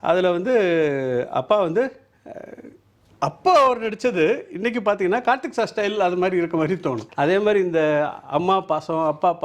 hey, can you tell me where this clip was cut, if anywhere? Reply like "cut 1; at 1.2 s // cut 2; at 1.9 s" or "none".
cut 1; at 7.0 s